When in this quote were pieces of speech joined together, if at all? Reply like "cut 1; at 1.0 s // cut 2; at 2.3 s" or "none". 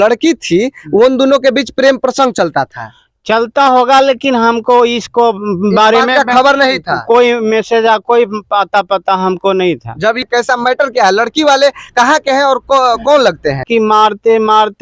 cut 1; at 10.2 s // cut 2; at 13.7 s